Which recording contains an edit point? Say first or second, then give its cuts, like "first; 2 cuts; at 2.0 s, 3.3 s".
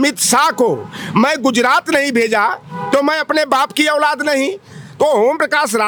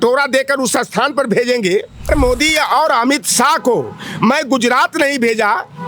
second; 1 cut; at 2.1 s